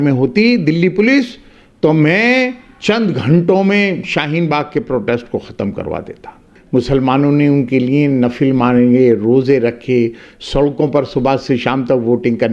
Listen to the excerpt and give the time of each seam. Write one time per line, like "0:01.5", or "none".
0:06.5